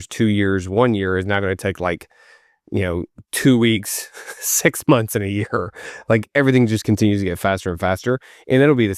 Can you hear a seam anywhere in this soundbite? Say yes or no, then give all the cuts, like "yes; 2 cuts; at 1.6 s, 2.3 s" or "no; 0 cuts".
no; 0 cuts